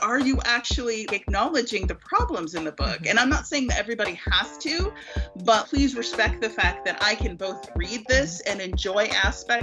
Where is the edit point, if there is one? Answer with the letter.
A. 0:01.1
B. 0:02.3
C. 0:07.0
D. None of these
A